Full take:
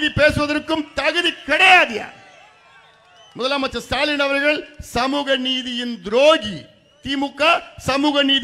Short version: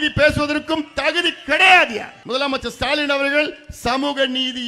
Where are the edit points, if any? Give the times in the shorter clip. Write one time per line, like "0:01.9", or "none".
0:02.1